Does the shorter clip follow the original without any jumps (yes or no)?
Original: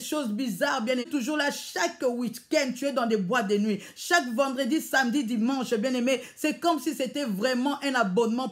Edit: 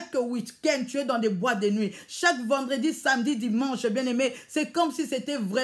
yes